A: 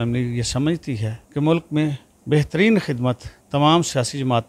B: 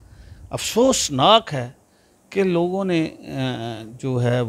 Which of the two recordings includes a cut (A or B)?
A